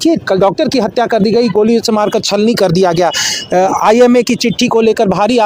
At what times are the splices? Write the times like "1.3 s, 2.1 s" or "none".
none